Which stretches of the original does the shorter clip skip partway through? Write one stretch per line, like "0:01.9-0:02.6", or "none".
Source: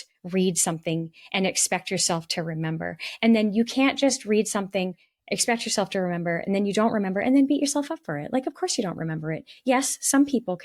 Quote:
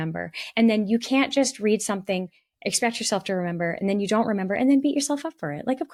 none